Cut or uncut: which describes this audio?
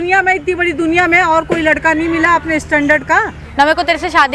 cut